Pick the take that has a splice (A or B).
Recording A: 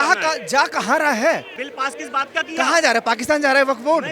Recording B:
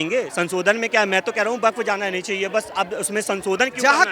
A